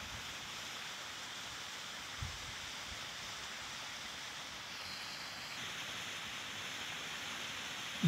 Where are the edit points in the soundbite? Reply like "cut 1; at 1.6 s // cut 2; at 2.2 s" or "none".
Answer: cut 1; at 5.6 s